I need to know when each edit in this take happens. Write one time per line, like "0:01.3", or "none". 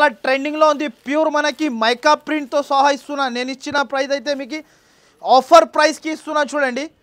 none